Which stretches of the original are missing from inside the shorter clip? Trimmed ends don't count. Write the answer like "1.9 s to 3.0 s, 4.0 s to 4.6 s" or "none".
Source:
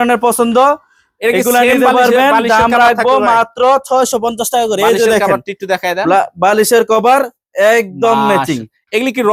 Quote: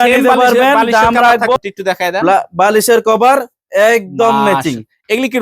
3.1 s to 5.4 s

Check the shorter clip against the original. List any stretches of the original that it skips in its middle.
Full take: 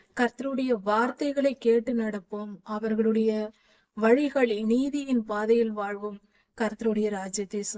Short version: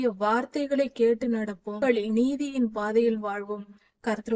2.4 s to 4.3 s

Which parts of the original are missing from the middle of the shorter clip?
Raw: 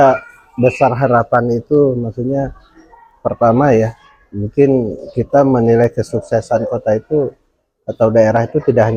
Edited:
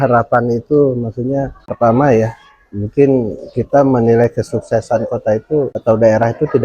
2.6 s to 3.2 s, 7.4 s to 7.9 s

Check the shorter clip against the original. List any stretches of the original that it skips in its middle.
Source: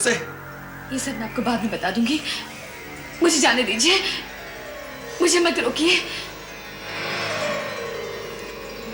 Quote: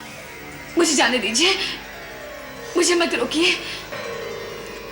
6.4 s to 7.7 s

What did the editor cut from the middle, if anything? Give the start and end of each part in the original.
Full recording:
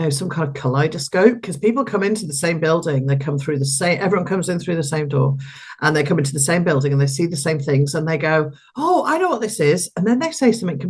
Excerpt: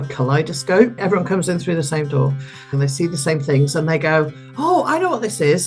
1.4 s to 4.0 s, 5.8 s to 7.0 s

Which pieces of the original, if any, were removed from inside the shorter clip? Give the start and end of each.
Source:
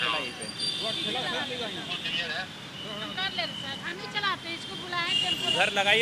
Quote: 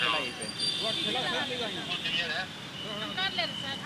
none

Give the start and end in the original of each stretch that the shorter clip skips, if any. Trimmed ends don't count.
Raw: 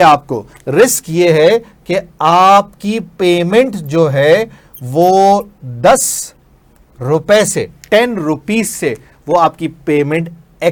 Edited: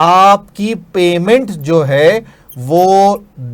none

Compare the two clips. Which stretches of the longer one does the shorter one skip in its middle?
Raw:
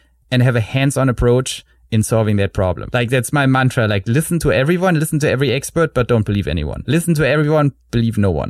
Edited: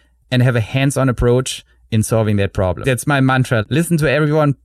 2.8 s to 3.1 s, 3.9 s to 6.8 s

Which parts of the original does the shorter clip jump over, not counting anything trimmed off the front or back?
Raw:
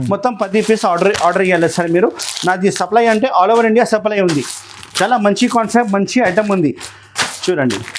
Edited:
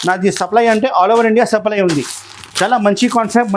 none

